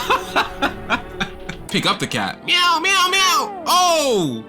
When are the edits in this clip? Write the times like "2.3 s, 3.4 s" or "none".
1.7 s